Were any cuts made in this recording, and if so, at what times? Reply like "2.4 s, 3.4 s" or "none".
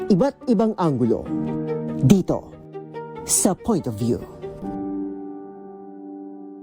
none